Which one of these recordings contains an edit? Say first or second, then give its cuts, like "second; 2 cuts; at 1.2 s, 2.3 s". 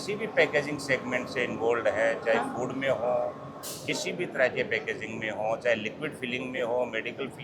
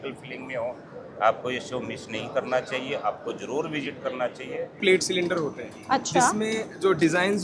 second; 1 cut; at 4.8 s